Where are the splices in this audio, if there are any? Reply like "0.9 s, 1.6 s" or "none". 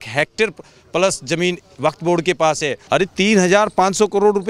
2.8 s